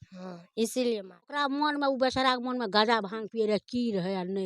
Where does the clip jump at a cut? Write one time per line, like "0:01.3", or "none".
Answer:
0:01.4